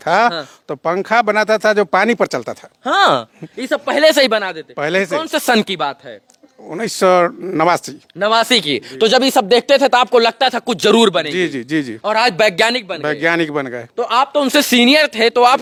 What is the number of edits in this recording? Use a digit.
0